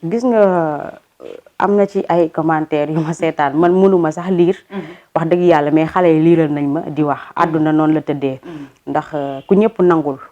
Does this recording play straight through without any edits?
yes; 0 cuts

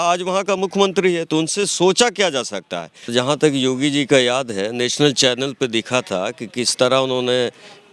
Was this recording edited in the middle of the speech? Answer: yes; 1 cut; at 3.1 s

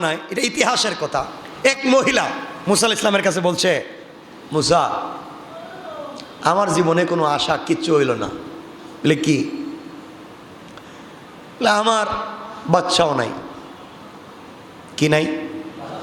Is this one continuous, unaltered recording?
no; 2 cuts; at 1.4 s, 2.5 s

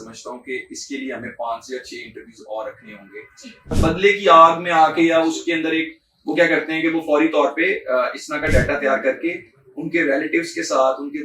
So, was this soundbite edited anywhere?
yes; 1 cut; at 3.7 s

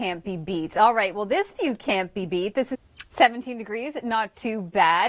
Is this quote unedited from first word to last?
no; 1 cut; at 2.8 s

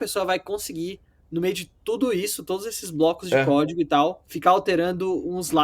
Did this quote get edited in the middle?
yes; 1 cut; at 4.3 s

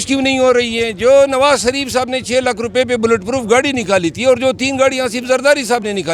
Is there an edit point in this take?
no; 0 cuts

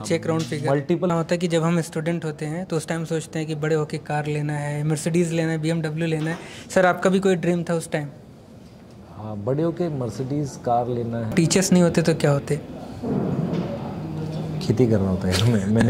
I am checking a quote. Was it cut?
yes; 2 cuts; at 1.1 s, 11.3 s

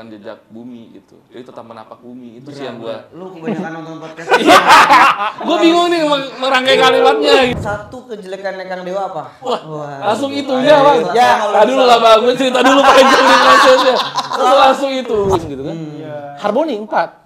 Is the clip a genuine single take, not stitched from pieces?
no; 2 cuts; at 7.6 s, 15.4 s

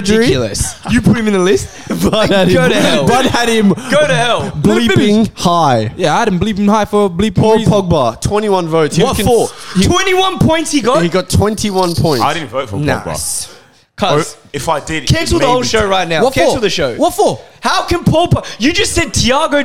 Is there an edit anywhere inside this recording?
no; 0 cuts

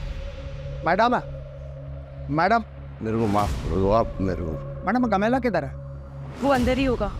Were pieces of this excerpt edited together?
no; 0 cuts

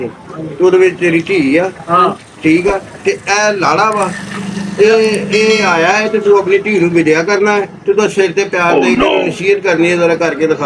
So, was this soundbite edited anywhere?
no; 0 cuts

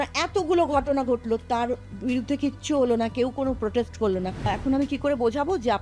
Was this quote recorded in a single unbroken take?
no; 1 cut; at 4.5 s

